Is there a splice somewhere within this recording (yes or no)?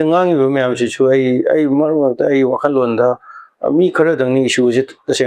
no